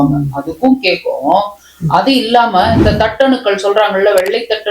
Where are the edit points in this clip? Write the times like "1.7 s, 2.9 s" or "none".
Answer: none